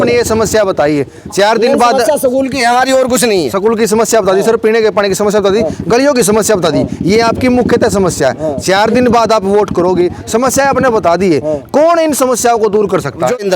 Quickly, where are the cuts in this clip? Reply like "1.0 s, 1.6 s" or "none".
none